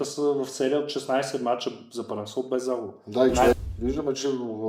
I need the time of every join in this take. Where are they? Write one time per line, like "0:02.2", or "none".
0:03.6